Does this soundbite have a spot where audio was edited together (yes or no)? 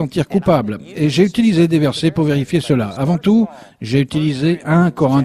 no